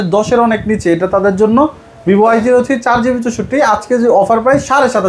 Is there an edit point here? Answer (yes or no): no